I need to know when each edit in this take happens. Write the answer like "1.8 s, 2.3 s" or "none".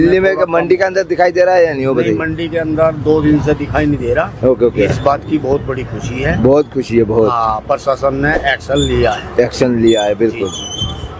none